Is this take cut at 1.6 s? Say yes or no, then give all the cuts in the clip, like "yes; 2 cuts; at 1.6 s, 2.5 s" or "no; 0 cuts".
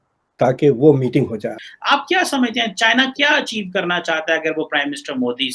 yes; 1 cut; at 1.6 s